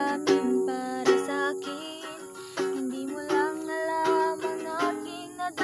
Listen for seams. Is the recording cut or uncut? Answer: uncut